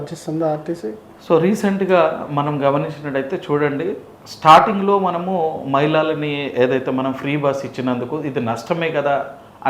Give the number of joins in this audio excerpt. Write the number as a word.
zero